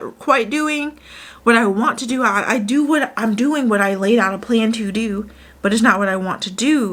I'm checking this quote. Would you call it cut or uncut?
uncut